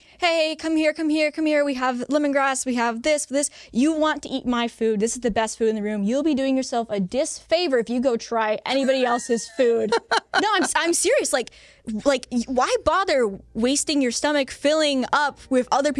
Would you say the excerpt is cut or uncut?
uncut